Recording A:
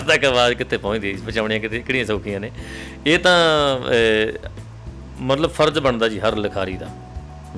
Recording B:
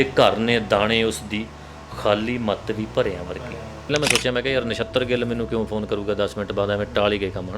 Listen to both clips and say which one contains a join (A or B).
B